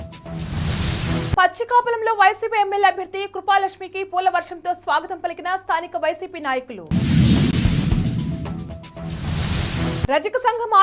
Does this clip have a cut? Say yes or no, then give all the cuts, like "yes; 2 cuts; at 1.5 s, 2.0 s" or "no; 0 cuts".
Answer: yes; 1 cut; at 1.3 s